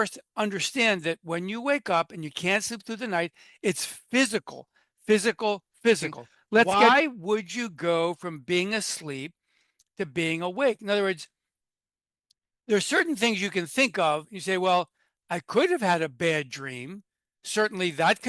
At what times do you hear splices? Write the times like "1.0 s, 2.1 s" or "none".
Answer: 6.7 s